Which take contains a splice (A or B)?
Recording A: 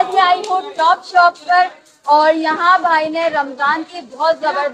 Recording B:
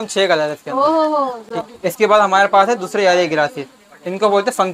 B